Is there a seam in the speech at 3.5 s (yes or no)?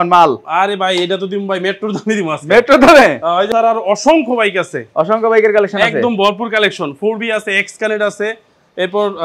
yes